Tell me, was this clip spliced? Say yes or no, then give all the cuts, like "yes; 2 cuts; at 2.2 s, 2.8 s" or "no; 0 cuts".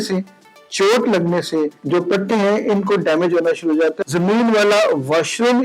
yes; 2 cuts; at 1.8 s, 4.0 s